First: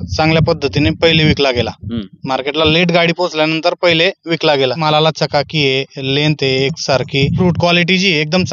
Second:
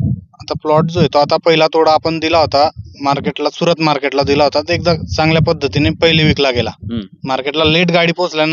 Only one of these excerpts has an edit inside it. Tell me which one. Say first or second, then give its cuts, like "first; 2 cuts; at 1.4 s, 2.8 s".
first; 2 cuts; at 4.8 s, 7.4 s